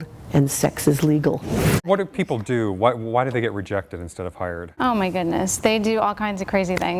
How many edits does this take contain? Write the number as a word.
one